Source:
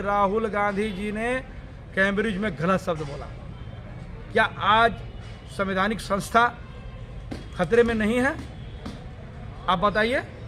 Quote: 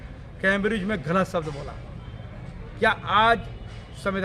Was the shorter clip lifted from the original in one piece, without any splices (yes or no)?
yes